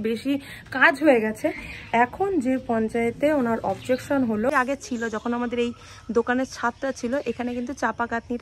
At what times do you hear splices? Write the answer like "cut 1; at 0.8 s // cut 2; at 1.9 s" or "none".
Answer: cut 1; at 4.5 s